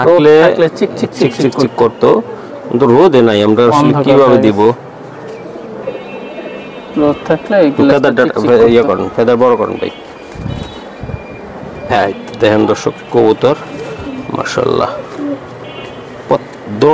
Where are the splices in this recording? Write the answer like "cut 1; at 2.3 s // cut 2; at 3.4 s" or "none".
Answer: none